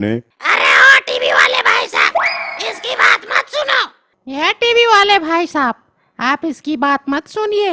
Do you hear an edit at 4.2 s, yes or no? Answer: yes